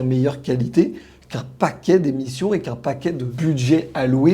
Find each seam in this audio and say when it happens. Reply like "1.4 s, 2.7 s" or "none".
3.3 s